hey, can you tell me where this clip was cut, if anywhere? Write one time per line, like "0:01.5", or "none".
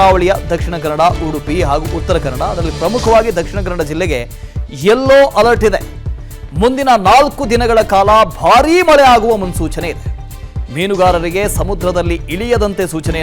0:09.5